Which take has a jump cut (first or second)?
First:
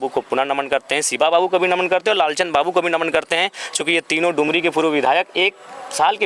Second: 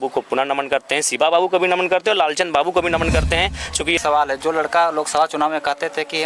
second